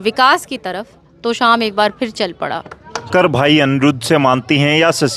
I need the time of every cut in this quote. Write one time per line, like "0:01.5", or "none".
0:03.1